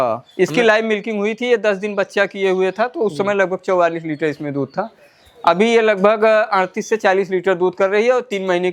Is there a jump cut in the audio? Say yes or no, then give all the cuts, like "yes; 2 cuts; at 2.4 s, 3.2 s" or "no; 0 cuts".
no; 0 cuts